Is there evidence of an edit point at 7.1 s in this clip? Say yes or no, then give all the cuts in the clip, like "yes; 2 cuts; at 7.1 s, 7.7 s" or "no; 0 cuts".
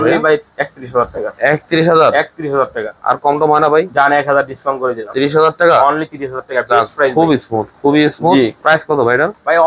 yes; 1 cut; at 7.1 s